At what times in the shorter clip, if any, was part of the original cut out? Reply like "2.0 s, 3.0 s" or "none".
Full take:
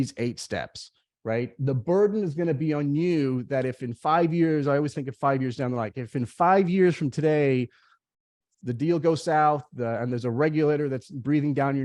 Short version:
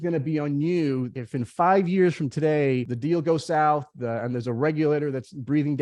1.1 s, 2.9 s